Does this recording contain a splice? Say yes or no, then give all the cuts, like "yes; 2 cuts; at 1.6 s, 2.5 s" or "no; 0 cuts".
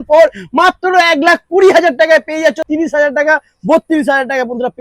yes; 1 cut; at 2.6 s